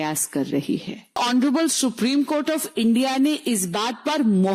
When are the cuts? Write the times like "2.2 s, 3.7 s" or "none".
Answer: 1.2 s